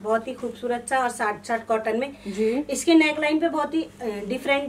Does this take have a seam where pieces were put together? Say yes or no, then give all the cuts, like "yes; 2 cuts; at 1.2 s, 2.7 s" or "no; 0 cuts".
no; 0 cuts